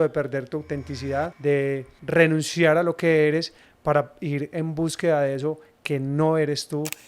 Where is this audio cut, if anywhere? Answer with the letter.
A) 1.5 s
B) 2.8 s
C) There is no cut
A